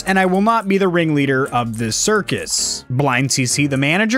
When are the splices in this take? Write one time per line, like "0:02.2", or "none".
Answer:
none

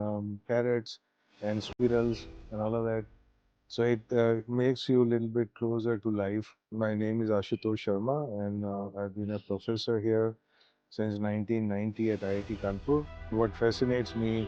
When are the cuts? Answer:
0:06.7
0:13.3

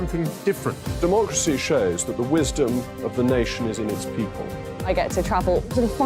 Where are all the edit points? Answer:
none

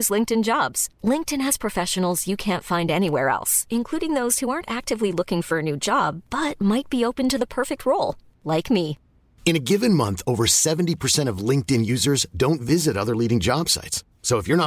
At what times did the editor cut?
none

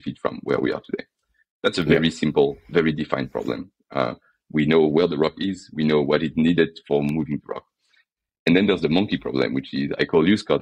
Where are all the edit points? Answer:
none

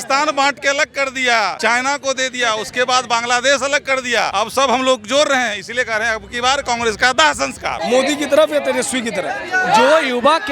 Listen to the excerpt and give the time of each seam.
0:01.6
0:04.3
0:07.7

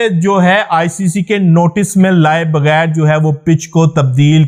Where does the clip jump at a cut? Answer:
none

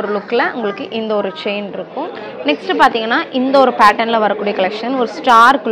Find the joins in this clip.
0:02.2

